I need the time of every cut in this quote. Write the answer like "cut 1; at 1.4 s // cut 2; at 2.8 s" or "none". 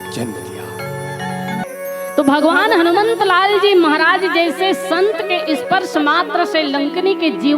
cut 1; at 1.6 s